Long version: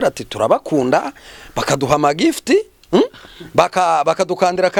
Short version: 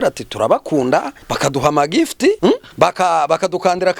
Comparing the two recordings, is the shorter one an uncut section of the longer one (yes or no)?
no